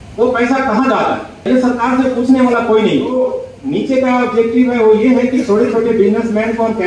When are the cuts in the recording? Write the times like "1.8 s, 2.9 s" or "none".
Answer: 1.5 s, 3.1 s